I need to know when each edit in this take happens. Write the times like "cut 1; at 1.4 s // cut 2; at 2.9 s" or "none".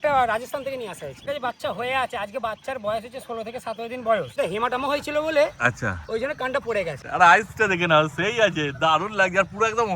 cut 1; at 1.2 s // cut 2; at 4.4 s // cut 3; at 7.0 s